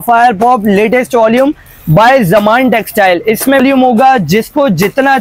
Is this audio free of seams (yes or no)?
no